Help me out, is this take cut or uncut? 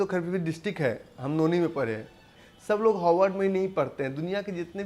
cut